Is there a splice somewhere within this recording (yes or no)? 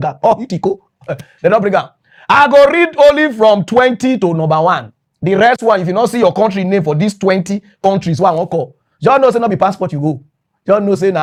no